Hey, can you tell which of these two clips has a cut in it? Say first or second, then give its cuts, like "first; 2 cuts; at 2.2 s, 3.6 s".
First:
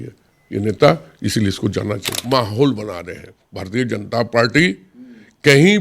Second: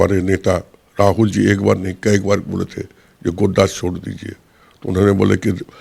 first; 1 cut; at 2.2 s